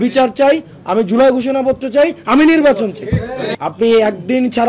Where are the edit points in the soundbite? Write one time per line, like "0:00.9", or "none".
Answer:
0:03.4